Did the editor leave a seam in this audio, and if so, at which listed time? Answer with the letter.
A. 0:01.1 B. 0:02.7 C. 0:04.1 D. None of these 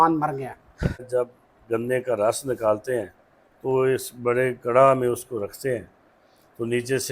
A